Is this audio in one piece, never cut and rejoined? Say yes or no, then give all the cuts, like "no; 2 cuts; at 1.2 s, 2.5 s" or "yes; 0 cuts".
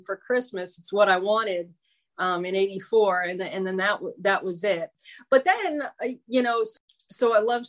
no; 2 cuts; at 4.9 s, 6.7 s